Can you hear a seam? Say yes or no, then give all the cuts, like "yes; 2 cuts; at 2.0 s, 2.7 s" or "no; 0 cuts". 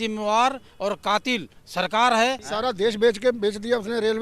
yes; 1 cut; at 2.4 s